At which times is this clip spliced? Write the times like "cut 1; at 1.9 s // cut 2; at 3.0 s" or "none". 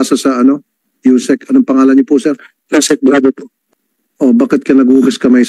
cut 1; at 3.5 s